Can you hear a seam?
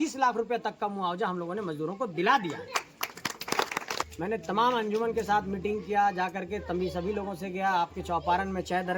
yes; 1 cut; at 4.0 s

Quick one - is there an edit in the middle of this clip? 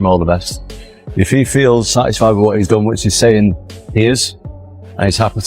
yes; 1 cut; at 1.9 s

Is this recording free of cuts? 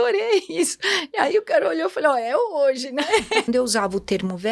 no; 1 cut; at 3.5 s

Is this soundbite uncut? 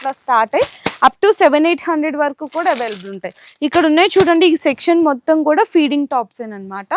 yes; 0 cuts

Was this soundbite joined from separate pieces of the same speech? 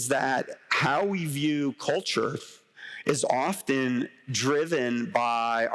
no; 0 cuts

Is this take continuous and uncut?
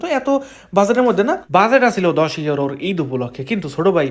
no; 1 cut; at 1.4 s

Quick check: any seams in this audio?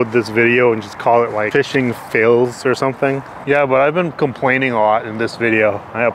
yes; 2 cuts; at 1.5 s, 3.3 s

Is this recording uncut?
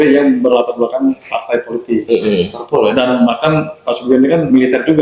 yes; 0 cuts

